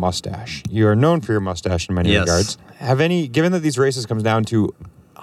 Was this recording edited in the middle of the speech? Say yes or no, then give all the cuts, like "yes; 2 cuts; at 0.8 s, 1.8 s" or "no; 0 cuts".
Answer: yes; 1 cut; at 2.7 s